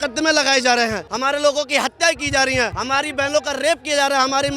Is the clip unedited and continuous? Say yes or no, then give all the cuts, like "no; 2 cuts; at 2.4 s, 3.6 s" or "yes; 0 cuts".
no; 2 cuts; at 1.1 s, 2.8 s